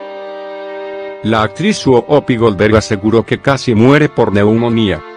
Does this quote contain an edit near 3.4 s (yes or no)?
no